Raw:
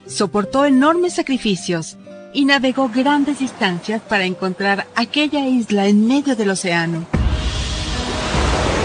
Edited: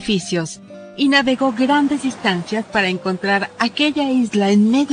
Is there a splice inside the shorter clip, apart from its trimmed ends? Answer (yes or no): no